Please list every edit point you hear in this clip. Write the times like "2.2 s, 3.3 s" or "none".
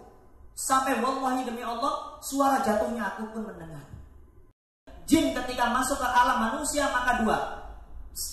4.9 s